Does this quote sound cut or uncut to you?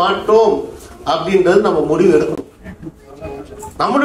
uncut